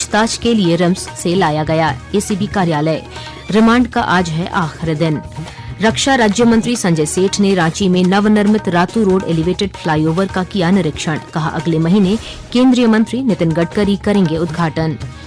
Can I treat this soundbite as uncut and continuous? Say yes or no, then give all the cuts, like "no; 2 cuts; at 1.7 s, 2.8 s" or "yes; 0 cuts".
yes; 0 cuts